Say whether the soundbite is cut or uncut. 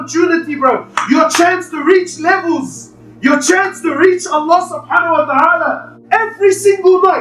cut